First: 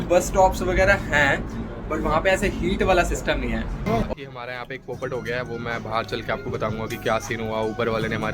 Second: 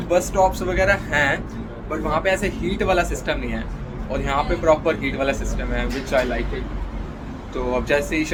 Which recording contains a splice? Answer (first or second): first